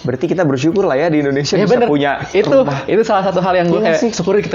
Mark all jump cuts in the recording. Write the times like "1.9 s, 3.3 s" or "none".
none